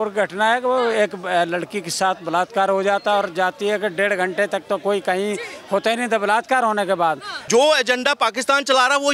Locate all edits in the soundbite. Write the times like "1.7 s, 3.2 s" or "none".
7.3 s